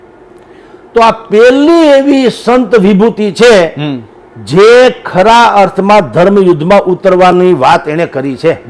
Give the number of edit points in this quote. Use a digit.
0